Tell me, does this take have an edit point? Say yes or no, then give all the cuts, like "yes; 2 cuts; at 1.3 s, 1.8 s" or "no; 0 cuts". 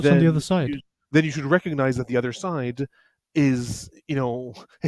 no; 0 cuts